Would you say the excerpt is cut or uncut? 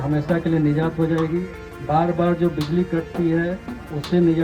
uncut